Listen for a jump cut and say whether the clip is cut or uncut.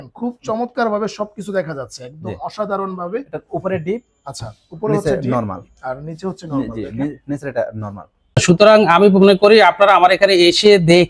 cut